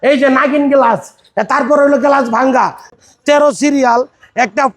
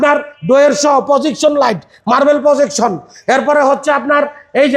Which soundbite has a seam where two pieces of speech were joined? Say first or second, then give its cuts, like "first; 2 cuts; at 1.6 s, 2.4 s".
first; 1 cut; at 2.9 s